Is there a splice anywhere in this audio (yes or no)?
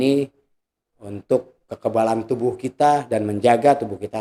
no